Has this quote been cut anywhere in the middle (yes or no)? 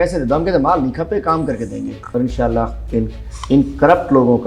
yes